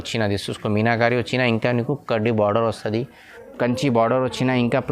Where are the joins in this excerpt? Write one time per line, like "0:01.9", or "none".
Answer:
0:03.4